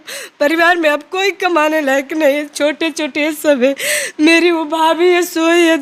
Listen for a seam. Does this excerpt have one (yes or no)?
no